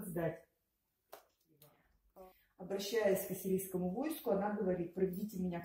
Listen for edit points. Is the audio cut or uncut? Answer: cut